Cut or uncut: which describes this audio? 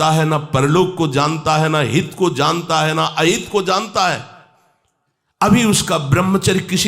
uncut